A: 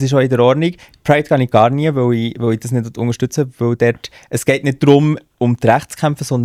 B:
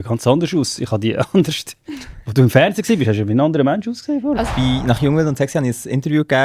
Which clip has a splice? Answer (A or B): B